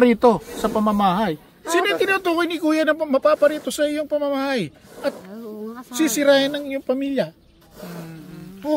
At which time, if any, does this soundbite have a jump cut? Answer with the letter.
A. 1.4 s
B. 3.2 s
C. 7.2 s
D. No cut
D